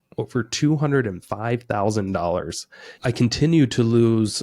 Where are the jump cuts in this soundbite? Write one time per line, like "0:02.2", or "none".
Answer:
0:02.9